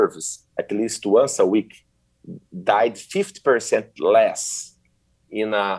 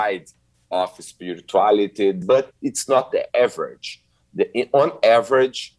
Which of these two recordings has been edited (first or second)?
second